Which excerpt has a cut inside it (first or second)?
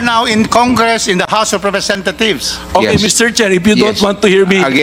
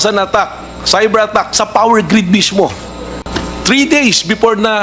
second